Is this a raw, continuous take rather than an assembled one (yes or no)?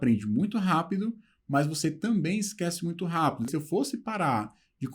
no